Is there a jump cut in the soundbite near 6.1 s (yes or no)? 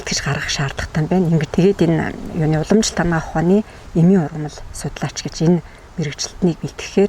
no